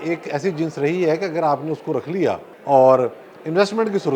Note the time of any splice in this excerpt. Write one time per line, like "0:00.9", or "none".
0:02.5